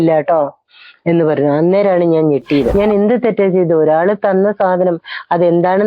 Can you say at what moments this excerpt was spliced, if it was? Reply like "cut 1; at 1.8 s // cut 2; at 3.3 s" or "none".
cut 1; at 2.7 s